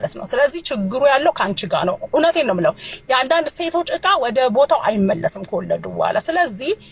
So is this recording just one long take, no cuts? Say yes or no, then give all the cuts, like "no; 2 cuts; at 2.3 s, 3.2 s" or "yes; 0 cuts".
yes; 0 cuts